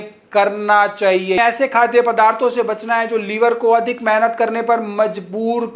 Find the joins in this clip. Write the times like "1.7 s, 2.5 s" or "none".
1.4 s